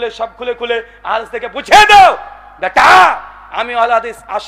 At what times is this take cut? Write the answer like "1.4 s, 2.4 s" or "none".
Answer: none